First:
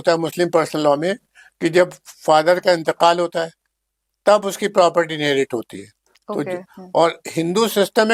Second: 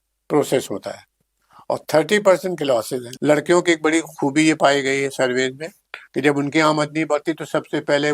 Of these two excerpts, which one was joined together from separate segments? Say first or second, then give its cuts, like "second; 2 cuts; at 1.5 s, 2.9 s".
second; 1 cut; at 3.0 s